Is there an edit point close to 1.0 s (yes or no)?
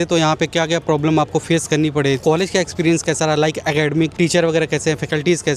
no